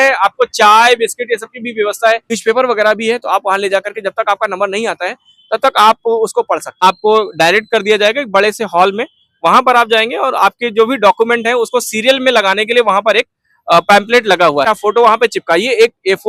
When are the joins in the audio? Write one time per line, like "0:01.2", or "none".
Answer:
0:02.4
0:06.8
0:14.7